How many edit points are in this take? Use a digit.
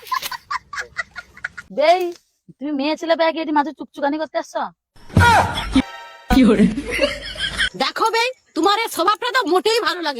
1